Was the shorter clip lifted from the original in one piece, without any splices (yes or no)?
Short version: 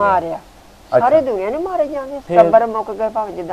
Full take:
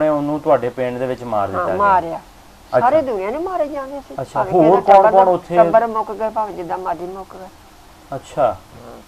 no